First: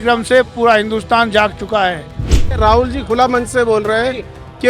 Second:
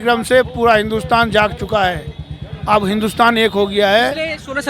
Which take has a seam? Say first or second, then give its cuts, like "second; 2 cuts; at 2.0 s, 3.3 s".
first; 1 cut; at 2.6 s